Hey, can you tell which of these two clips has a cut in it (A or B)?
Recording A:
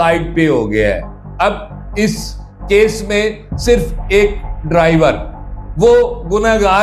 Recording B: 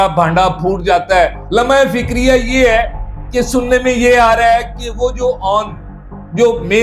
B